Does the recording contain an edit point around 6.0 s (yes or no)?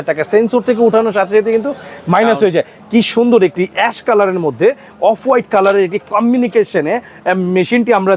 no